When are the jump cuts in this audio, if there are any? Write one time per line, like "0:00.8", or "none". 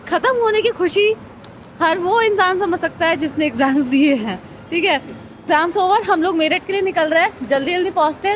0:05.4